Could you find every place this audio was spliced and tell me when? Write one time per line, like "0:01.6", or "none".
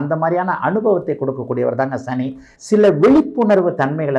0:02.5